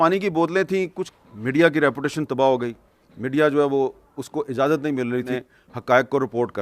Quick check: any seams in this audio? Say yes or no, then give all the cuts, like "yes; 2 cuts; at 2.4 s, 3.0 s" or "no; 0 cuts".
yes; 2 cuts; at 1.0 s, 5.3 s